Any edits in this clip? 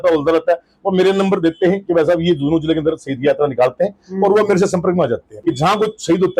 yes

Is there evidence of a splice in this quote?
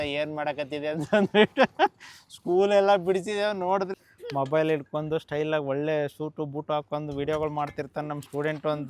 yes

